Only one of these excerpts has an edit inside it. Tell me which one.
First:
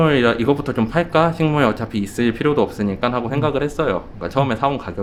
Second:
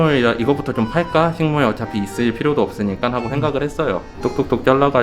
second; 1 cut; at 4.1 s

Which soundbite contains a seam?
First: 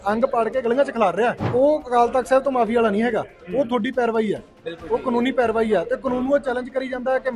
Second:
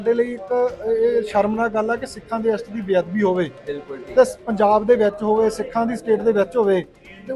first; 1 cut; at 1.4 s

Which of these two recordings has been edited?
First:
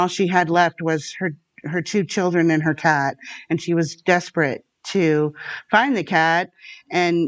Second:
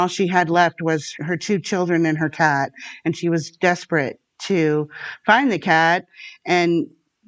second; 1 cut; at 1.1 s

